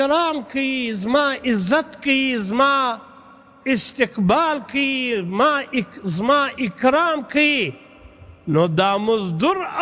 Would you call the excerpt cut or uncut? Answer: uncut